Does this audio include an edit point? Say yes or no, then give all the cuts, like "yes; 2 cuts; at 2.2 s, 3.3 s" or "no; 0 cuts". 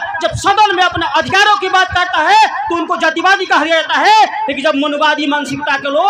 no; 0 cuts